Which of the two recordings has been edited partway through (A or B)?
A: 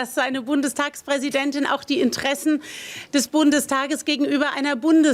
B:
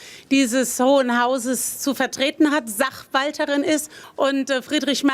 B